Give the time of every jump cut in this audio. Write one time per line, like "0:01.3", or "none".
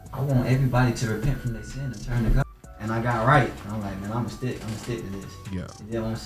0:02.4